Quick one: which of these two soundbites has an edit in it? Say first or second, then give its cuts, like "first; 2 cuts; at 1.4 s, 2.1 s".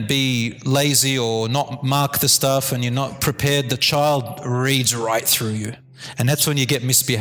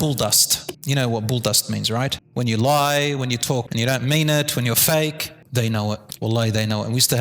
second; 3 cuts; at 2.2 s, 3.7 s, 5.8 s